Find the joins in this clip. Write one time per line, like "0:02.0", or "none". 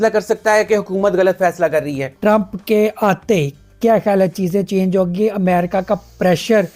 0:02.1